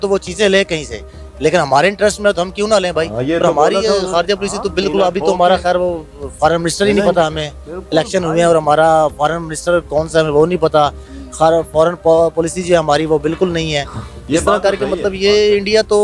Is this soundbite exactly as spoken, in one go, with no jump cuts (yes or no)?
yes